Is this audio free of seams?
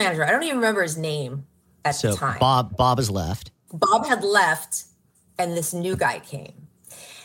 yes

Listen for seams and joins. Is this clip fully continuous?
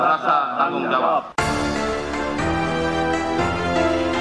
no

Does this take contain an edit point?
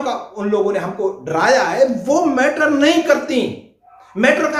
no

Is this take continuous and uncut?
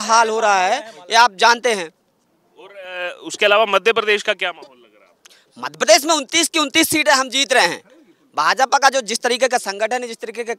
yes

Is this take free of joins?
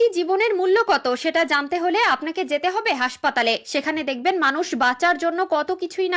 yes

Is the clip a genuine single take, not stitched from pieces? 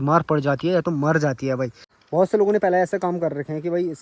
no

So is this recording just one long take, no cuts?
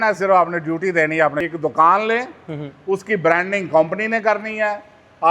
no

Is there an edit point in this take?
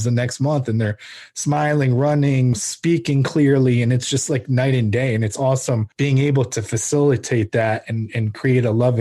yes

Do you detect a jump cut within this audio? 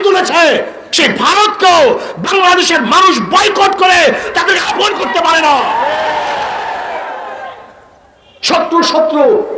no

